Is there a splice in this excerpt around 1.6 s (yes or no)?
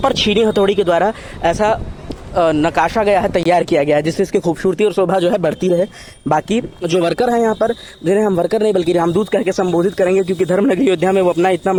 no